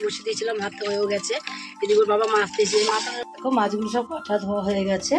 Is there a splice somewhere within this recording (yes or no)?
yes